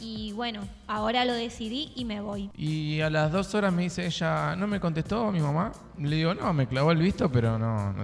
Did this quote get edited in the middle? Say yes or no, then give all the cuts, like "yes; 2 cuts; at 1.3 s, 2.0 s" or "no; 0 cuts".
yes; 1 cut; at 3.0 s